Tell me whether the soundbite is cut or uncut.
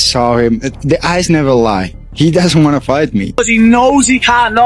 cut